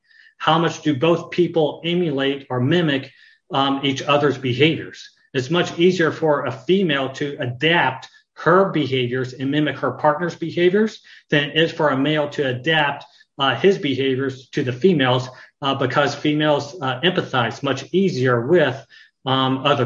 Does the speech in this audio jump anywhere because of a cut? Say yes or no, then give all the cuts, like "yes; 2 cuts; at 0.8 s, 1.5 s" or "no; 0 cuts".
no; 0 cuts